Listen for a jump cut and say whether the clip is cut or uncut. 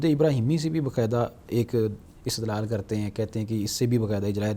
uncut